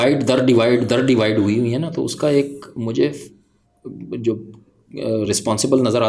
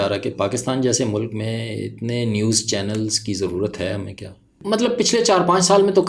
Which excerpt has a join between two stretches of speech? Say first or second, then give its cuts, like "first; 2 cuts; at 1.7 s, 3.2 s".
second; 1 cut; at 4.5 s